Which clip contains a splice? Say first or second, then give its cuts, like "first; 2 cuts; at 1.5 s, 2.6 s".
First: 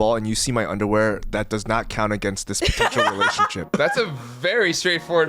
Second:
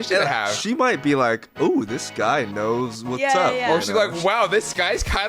first; 1 cut; at 3.8 s